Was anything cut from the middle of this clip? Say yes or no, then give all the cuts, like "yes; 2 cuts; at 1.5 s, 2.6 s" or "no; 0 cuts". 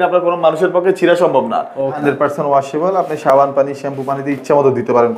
yes; 1 cut; at 2.0 s